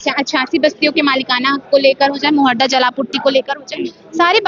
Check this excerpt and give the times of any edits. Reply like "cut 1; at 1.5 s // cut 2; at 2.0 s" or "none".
none